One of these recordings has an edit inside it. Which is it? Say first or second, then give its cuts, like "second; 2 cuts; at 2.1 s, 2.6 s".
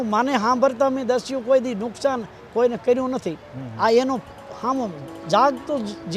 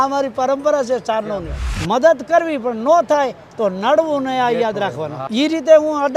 second; 2 cuts; at 1.7 s, 5.1 s